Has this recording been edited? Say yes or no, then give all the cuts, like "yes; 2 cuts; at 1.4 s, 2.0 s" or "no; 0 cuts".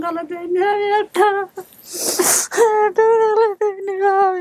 no; 0 cuts